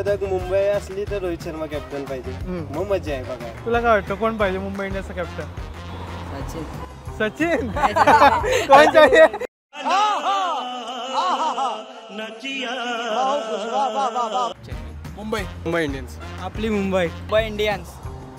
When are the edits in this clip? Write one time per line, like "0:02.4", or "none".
none